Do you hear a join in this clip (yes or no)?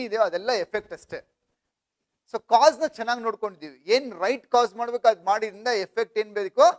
no